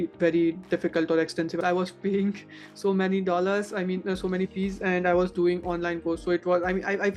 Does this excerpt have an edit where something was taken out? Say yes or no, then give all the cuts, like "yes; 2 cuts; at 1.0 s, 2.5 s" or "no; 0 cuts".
yes; 1 cut; at 1.6 s